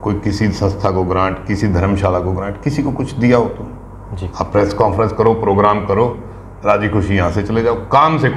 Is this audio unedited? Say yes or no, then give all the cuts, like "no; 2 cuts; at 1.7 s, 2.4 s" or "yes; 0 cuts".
yes; 0 cuts